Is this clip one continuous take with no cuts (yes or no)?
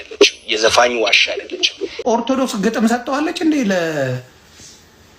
no